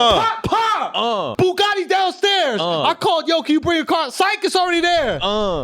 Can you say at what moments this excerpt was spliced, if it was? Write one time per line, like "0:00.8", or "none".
0:01.3